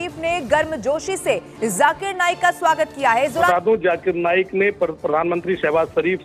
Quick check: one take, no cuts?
no; 1 cut; at 3.5 s

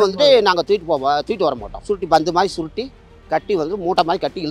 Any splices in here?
yes; 1 cut; at 1.7 s

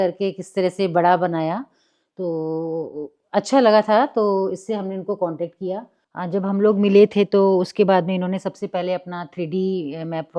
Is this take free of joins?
no; 1 cut; at 6.1 s

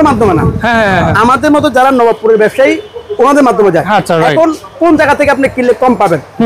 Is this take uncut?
yes; 0 cuts

